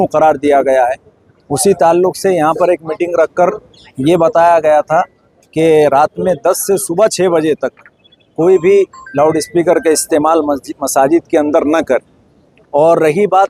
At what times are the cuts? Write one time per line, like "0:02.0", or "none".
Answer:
none